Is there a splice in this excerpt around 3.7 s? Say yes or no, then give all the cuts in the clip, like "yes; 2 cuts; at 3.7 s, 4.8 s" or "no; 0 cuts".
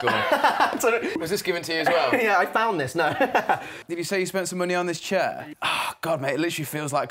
yes; 3 cuts; at 1.2 s, 3.7 s, 5.4 s